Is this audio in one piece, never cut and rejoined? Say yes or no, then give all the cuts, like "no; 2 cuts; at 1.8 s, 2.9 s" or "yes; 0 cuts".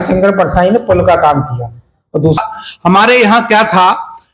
no; 1 cut; at 2.4 s